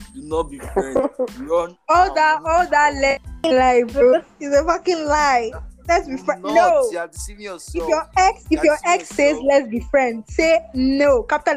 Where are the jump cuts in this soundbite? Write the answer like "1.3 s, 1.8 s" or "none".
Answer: 3.3 s